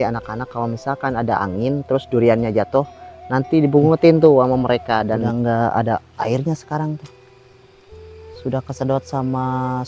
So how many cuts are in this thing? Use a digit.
1